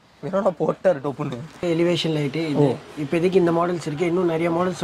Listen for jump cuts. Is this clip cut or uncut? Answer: cut